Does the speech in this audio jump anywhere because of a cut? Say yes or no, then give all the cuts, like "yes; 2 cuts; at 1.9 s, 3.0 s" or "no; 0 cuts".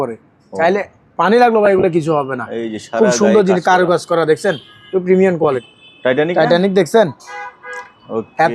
yes; 1 cut; at 5.7 s